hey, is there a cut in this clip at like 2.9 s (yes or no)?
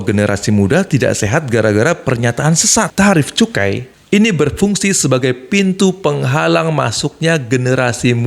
yes